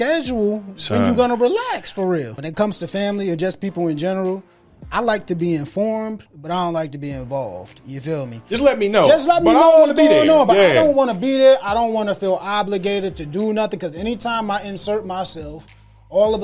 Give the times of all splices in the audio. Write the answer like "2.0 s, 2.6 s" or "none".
2.4 s